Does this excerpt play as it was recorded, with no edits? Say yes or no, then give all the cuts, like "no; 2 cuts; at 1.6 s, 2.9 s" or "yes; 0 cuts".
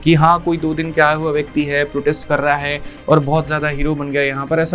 yes; 0 cuts